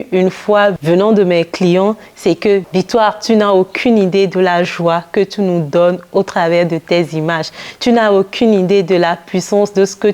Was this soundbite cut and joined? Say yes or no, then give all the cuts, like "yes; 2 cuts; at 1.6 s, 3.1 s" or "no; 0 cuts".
yes; 2 cuts; at 0.8 s, 2.7 s